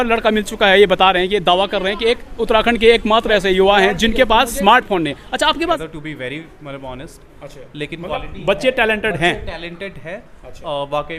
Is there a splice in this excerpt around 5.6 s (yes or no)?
yes